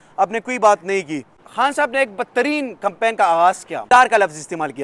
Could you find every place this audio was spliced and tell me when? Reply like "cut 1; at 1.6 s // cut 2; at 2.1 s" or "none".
cut 1; at 1.4 s // cut 2; at 3.8 s

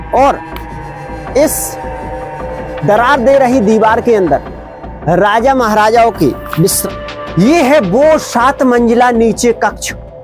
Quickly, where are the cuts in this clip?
cut 1; at 6.8 s

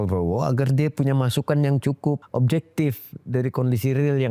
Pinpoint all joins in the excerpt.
cut 1; at 2.2 s

